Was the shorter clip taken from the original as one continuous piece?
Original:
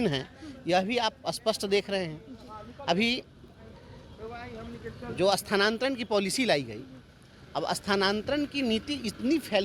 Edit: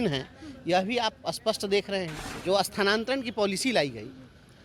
no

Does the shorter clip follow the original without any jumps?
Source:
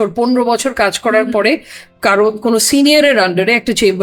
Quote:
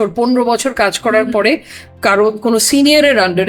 yes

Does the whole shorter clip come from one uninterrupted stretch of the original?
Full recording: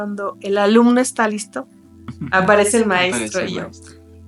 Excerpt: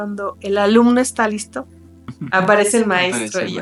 yes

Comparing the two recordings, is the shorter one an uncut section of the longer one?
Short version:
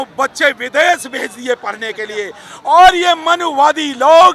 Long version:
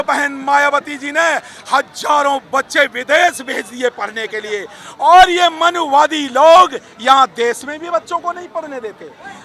yes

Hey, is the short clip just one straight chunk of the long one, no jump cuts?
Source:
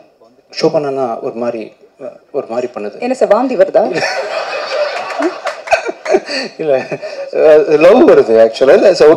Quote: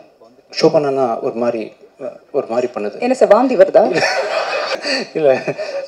no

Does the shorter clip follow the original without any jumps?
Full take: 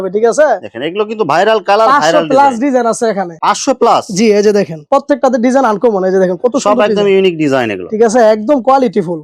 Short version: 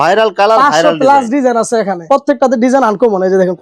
no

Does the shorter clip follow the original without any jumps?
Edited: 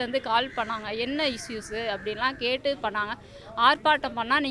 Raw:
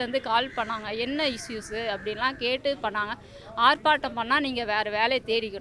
yes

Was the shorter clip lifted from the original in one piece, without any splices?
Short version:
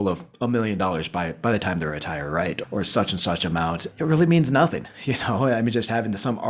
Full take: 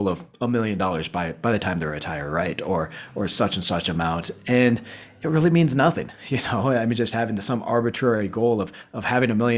no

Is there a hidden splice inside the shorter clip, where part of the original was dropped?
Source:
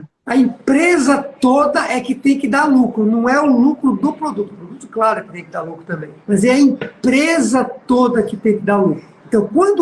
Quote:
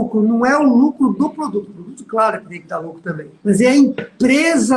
no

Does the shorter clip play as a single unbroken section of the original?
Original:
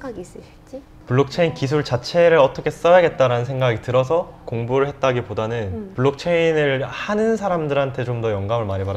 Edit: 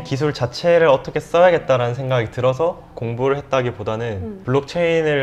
yes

